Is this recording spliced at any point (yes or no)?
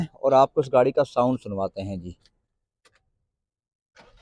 no